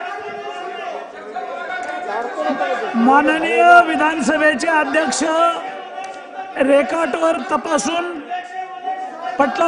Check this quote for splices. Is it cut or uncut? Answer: uncut